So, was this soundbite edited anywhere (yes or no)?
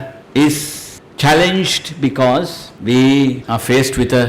no